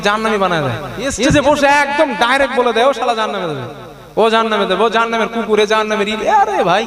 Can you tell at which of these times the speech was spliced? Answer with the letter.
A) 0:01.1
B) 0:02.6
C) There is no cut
A